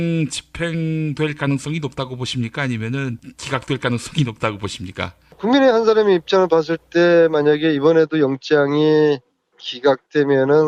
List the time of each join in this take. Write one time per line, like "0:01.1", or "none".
none